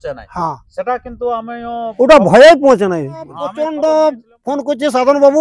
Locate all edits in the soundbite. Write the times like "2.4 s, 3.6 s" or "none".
3.4 s